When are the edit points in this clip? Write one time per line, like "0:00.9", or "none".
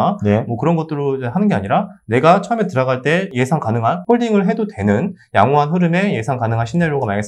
none

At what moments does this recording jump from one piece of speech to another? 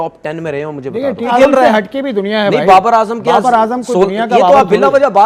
0:01.3

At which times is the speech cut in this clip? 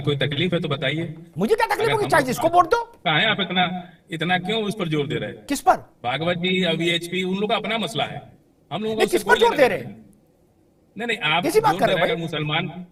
none

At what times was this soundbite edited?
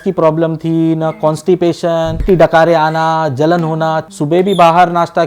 0:02.2
0:04.1

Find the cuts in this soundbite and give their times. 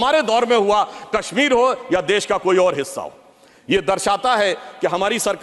none

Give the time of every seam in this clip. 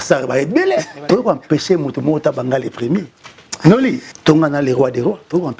0:00.9
0:04.1

